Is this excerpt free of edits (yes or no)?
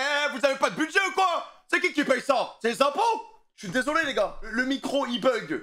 yes